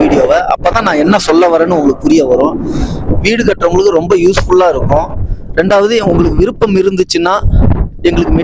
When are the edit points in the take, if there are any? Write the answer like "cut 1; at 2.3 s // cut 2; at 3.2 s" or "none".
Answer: none